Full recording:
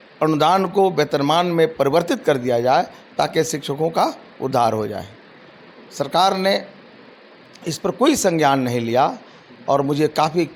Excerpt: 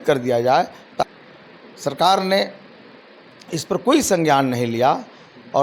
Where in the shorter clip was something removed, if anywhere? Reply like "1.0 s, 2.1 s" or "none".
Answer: 1.0 s